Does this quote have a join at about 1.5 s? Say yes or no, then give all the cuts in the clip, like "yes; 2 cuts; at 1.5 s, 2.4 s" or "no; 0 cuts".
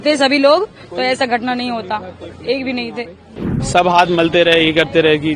no; 1 cut; at 3.4 s